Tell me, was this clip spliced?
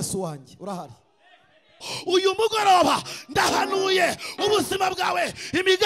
yes; 1 cut; at 1.9 s

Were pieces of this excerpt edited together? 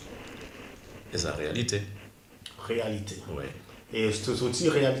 no; 0 cuts

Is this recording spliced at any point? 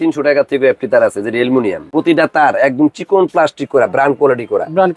yes; 1 cut; at 1.9 s

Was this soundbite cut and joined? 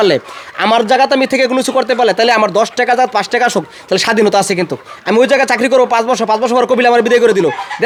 no; 0 cuts

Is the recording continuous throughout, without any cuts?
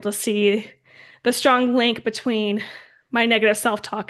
yes; 0 cuts

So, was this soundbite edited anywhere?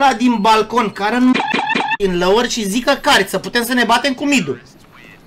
no; 0 cuts

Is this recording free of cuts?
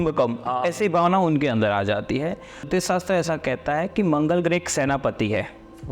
no; 1 cut; at 2.7 s

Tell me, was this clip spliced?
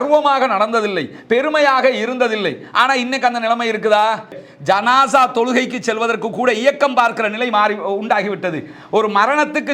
yes; 1 cut; at 4.4 s

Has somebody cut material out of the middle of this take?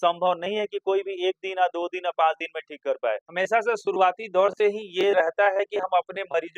yes; 1 cut; at 3.3 s

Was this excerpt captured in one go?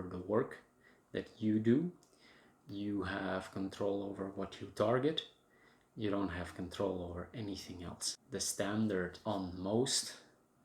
no; 1 cut; at 8.1 s

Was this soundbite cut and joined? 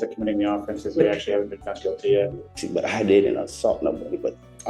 yes; 1 cut; at 2.5 s

